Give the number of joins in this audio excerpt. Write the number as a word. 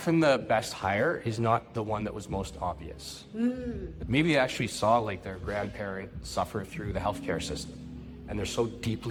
zero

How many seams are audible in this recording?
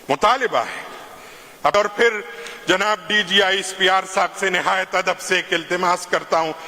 one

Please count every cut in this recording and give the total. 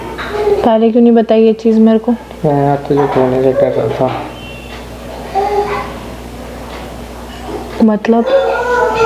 zero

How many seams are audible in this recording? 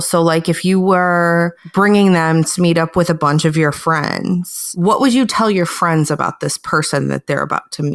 zero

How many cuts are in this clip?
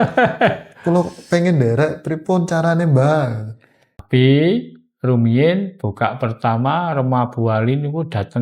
one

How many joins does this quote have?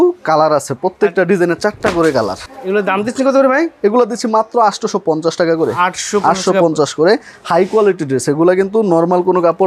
zero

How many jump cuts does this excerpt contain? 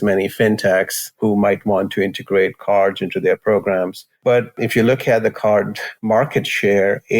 two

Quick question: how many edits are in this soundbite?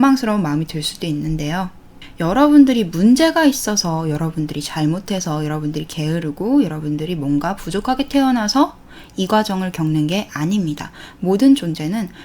one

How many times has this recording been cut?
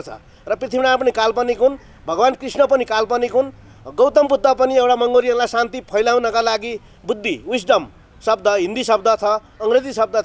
zero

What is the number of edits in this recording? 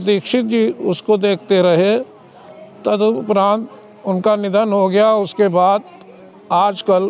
zero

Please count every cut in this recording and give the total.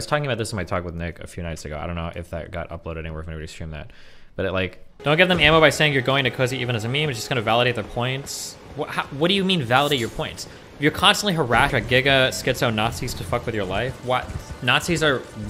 two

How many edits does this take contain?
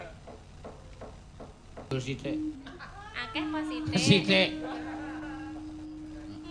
one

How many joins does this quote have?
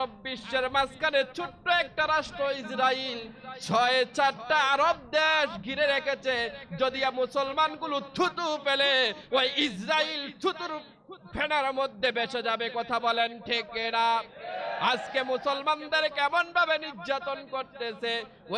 zero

